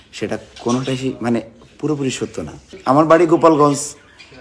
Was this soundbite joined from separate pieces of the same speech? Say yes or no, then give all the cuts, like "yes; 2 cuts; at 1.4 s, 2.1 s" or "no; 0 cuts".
yes; 1 cut; at 2.7 s